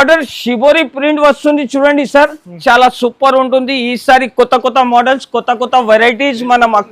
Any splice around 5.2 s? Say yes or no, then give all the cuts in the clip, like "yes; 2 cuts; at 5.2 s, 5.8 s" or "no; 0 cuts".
no; 1 cut; at 2.6 s